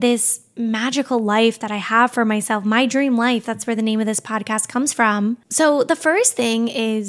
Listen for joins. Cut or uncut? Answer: uncut